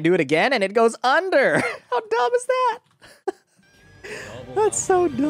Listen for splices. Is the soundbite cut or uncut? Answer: uncut